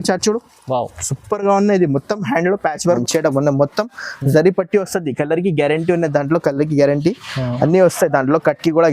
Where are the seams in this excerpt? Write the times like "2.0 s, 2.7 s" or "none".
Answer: 3.0 s